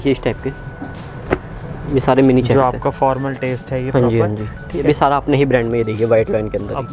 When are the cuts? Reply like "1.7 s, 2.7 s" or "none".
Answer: 4.8 s